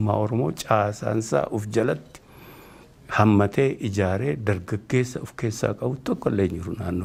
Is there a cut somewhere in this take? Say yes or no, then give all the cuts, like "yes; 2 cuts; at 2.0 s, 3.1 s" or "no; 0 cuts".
no; 0 cuts